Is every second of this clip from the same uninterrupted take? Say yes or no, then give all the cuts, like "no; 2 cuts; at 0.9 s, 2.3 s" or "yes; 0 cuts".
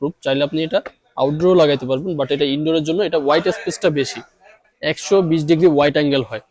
no; 1 cut; at 4.7 s